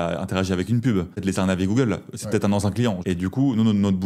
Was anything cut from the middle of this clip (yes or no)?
yes